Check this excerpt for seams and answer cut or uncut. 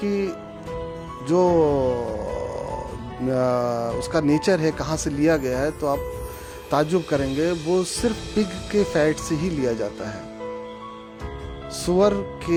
uncut